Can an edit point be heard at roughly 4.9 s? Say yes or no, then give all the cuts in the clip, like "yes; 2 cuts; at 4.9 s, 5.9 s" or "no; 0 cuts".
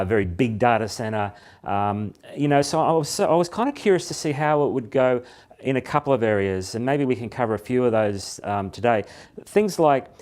yes; 1 cut; at 4.9 s